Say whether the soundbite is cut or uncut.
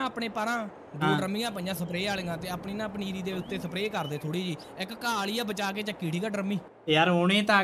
cut